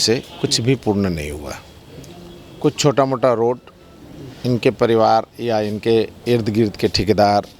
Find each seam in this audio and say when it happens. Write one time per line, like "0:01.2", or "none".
none